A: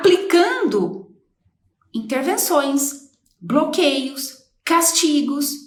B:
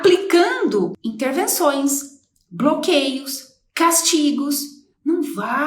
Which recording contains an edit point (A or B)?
B